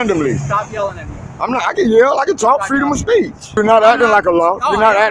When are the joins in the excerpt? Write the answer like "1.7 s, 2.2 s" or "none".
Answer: 3.5 s